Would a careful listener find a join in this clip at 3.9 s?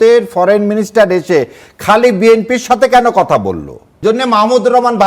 yes; 1 cut; at 3.9 s

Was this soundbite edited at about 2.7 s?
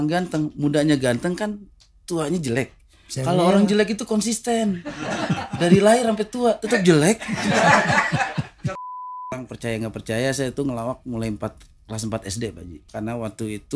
no; 2 cuts; at 9.3 s, 12.8 s

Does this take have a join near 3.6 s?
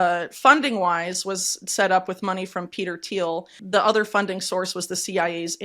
yes; 1 cut; at 3.6 s

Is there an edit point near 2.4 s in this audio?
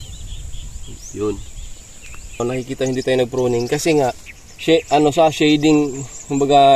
yes; 1 cut; at 2.4 s

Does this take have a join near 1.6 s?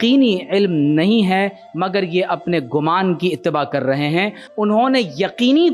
yes; 2 cuts; at 1.6 s, 4.4 s

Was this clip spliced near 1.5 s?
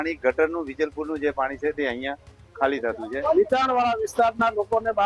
no; 1 cut; at 3.2 s

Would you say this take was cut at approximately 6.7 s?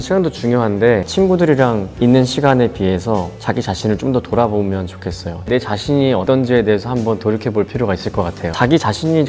no; 2 cuts; at 1.0 s, 5.5 s

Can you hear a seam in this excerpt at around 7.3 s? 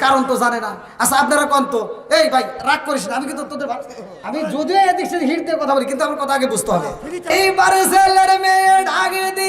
yes; 1 cut; at 7.3 s

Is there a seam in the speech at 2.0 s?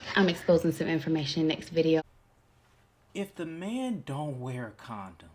yes; 1 cut; at 2.0 s

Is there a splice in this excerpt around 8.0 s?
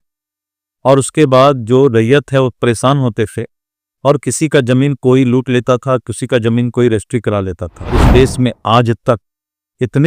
yes; 1 cut; at 8.0 s

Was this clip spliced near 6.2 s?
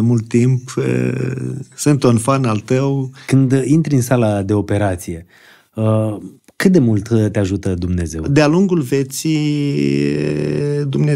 no; 2 cuts; at 3.1 s, 8.3 s

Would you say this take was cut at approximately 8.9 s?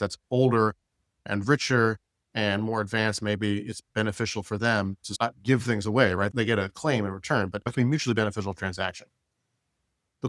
no; 4 cuts; at 1.3 s, 5.1 s, 6.3 s, 7.7 s

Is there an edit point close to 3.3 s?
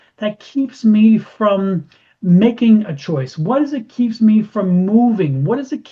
no; 0 cuts

